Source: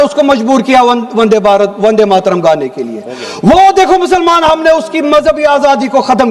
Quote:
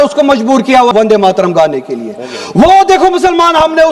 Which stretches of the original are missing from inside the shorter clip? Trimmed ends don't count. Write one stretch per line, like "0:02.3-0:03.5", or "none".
0:00.9-0:01.8